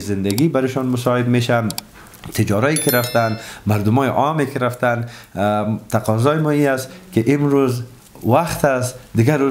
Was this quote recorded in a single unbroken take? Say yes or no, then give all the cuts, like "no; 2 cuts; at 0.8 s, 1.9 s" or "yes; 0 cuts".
yes; 0 cuts